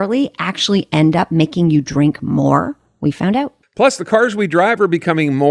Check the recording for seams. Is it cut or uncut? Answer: cut